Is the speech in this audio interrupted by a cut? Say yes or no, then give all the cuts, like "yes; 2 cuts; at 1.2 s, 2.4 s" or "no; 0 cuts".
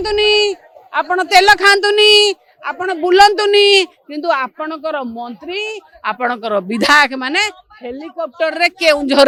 no; 0 cuts